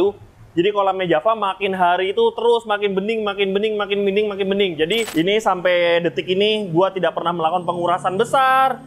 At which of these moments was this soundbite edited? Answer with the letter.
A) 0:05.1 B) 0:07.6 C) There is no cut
A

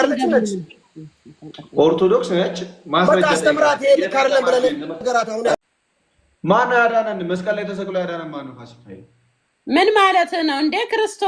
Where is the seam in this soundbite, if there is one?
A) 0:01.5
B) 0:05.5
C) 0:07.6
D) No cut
B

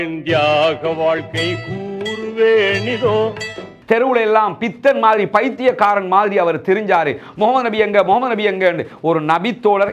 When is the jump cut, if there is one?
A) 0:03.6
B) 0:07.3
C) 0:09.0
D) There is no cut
A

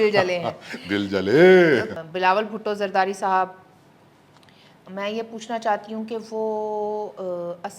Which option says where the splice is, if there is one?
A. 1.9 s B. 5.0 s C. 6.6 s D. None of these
A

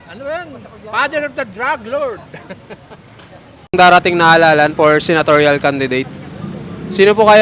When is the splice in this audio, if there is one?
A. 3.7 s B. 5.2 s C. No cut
A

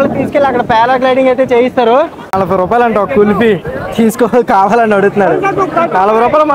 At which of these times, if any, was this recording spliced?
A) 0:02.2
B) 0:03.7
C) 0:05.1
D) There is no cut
A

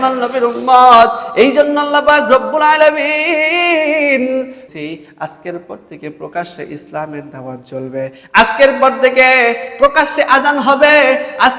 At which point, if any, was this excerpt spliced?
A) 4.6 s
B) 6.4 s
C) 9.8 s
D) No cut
A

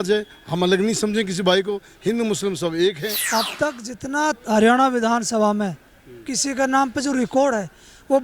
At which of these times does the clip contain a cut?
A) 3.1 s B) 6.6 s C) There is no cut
A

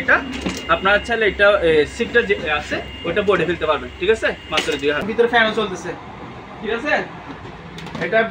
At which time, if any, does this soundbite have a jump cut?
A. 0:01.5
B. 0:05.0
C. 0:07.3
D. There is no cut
B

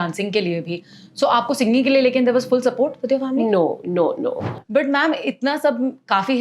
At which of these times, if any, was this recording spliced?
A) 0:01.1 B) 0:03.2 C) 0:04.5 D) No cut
C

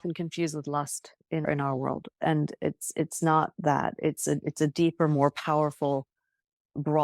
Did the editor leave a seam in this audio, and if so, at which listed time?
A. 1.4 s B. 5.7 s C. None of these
A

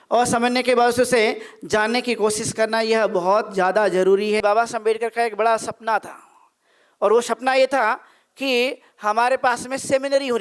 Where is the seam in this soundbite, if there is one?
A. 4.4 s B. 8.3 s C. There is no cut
A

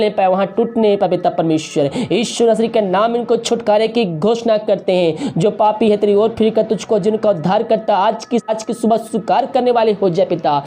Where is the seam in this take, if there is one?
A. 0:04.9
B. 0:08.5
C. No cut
B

